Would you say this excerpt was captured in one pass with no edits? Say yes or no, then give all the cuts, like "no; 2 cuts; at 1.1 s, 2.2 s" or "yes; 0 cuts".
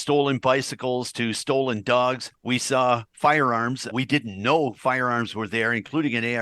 no; 2 cuts; at 2.3 s, 3.9 s